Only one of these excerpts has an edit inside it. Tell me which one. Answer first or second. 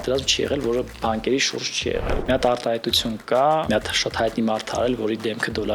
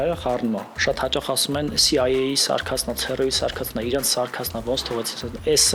first